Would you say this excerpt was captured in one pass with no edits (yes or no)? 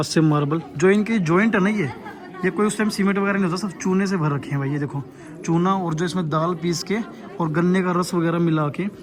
yes